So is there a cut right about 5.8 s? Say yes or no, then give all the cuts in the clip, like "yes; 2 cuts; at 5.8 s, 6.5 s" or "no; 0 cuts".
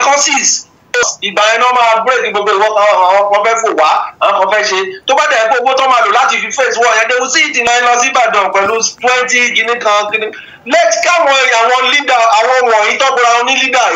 no; 2 cuts; at 1.0 s, 7.7 s